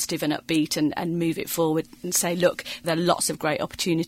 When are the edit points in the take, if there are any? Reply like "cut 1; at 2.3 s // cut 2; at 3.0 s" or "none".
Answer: cut 1; at 2.8 s